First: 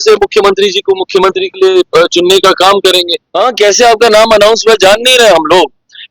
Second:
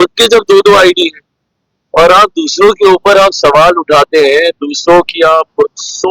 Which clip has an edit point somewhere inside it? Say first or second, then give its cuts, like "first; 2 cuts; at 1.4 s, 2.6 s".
first; 1 cut; at 3.2 s